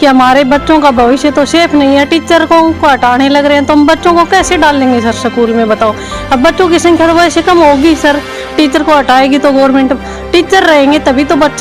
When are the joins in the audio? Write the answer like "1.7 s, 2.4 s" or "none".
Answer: none